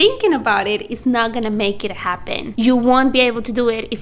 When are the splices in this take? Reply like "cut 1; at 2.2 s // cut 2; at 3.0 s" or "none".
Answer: cut 1; at 2.5 s